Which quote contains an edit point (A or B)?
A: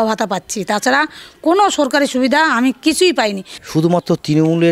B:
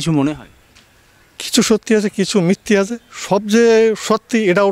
A